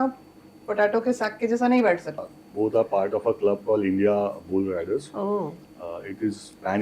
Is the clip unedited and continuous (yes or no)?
no